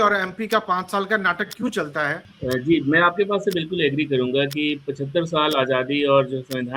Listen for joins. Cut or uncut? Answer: cut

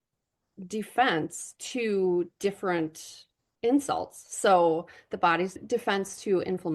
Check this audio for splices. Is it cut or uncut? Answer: uncut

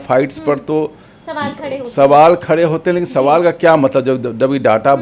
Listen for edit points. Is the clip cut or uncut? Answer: uncut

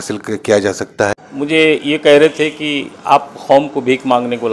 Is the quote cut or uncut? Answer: cut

